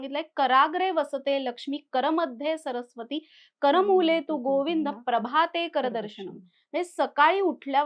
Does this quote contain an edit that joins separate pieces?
no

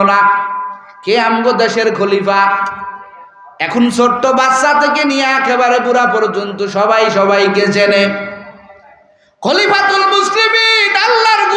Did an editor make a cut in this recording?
no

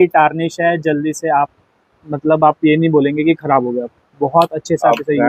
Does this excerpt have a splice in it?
no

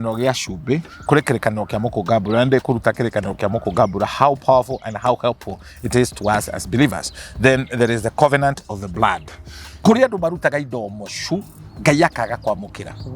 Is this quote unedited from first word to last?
no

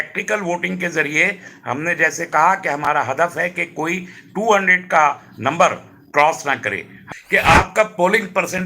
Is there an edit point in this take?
yes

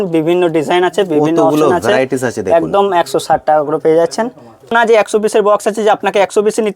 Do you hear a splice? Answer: yes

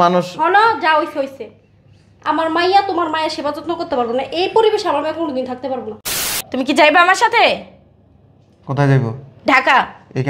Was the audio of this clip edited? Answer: yes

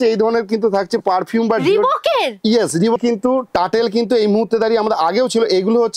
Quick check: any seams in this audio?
yes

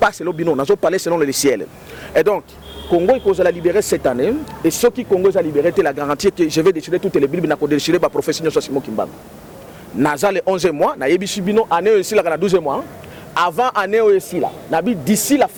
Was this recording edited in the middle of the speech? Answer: no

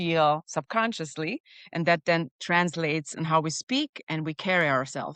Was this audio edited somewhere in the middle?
no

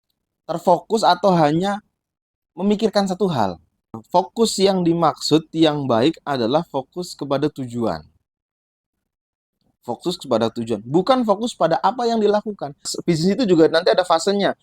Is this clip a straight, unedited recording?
no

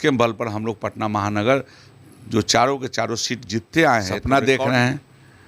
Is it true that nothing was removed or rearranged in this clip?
no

